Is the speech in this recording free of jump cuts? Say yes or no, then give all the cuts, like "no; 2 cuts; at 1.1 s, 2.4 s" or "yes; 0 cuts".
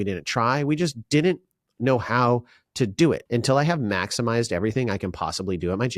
no; 1 cut; at 3.2 s